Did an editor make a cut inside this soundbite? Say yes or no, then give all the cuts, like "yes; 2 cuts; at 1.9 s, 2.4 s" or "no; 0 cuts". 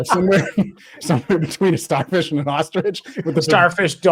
no; 0 cuts